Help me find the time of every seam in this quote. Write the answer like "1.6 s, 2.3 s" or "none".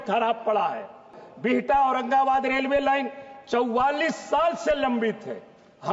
1.2 s